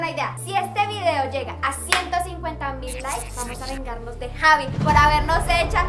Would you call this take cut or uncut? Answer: uncut